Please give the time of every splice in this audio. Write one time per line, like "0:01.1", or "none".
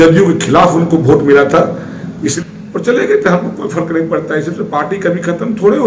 0:02.3